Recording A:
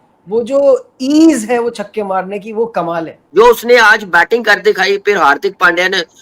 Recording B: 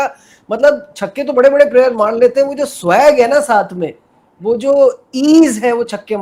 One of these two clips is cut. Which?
A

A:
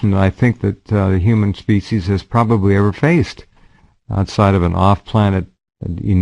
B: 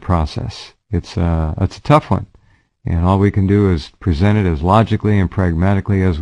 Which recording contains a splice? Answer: B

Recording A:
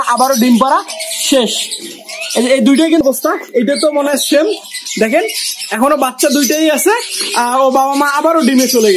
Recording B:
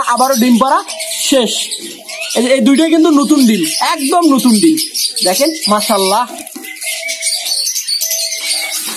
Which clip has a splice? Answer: A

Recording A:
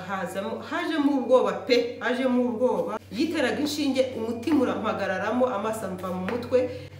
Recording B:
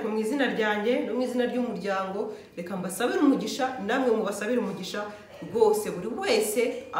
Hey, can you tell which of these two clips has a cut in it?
A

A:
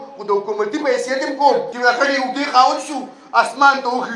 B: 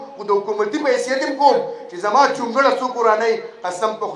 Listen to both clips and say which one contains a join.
A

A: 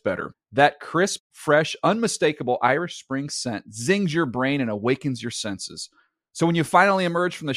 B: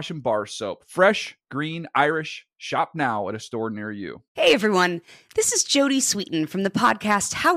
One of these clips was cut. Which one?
B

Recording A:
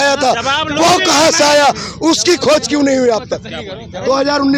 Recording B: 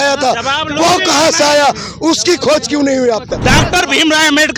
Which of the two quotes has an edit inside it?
B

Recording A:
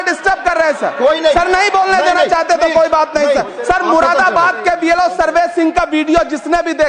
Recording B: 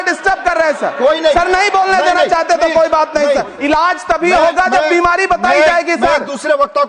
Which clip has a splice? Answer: B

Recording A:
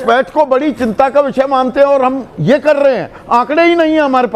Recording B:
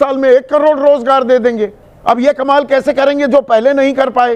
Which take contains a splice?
B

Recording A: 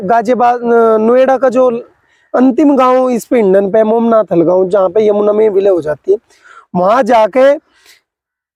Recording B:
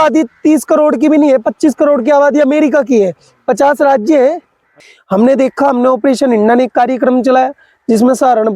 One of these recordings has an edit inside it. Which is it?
B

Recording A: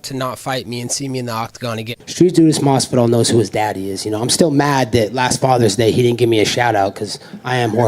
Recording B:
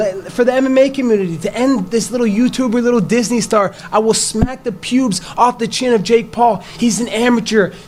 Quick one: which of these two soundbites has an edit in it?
A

